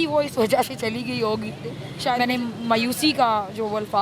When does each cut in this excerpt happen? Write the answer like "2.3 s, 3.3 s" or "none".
2.2 s